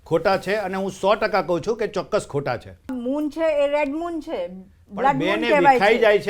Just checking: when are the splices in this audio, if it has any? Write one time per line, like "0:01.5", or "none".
0:02.9